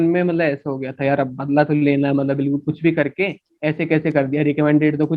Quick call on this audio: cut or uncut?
uncut